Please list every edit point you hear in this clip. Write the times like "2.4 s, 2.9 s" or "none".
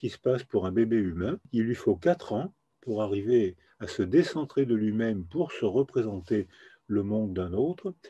1.5 s